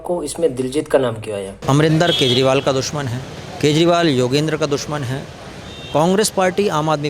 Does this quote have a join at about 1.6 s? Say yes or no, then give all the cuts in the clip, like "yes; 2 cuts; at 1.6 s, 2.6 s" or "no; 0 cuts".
yes; 1 cut; at 1.6 s